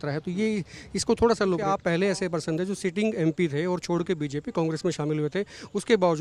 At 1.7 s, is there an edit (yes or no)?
yes